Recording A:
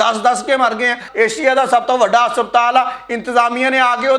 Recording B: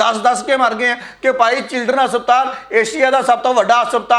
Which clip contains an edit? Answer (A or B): A